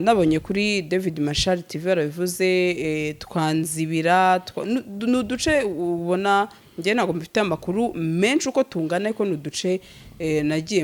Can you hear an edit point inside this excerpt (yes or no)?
no